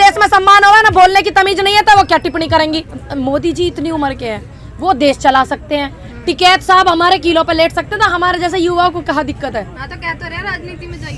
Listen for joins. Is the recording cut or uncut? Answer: uncut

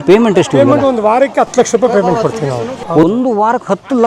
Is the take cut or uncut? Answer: cut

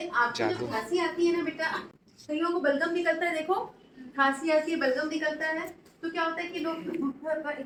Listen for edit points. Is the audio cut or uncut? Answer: uncut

